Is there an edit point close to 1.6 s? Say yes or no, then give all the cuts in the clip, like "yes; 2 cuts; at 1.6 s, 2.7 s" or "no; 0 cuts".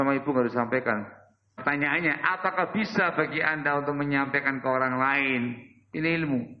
yes; 1 cut; at 1.6 s